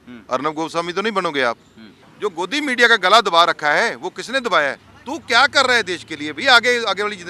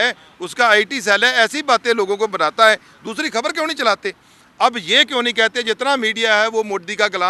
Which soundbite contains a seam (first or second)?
first